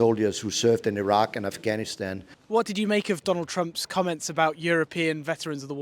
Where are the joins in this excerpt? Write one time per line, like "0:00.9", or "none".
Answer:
none

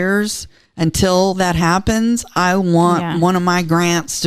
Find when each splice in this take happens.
none

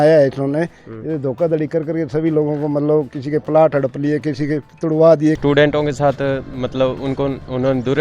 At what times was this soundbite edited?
0:05.4

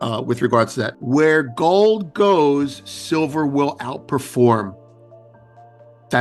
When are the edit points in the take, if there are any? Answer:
0:00.9

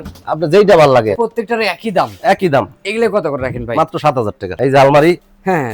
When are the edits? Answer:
0:01.2
0:04.6

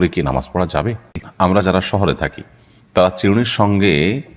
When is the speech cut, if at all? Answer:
0:01.2

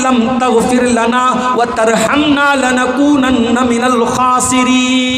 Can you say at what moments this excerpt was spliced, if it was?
none

